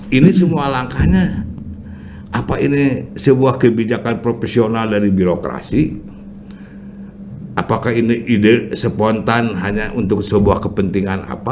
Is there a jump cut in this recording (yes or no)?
no